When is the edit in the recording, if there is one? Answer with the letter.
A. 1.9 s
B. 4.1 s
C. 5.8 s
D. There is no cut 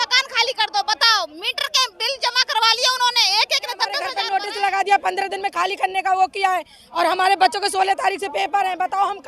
B